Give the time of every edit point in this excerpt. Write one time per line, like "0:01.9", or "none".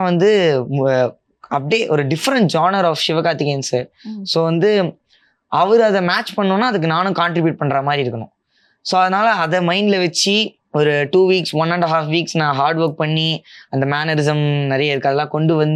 none